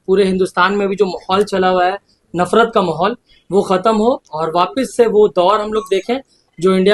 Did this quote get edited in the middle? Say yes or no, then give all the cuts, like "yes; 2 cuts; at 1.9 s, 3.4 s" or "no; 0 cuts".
no; 0 cuts